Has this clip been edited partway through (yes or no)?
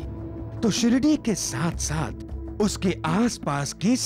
no